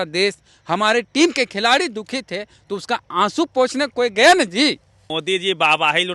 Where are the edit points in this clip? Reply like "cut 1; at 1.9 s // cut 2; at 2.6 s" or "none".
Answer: cut 1; at 5.1 s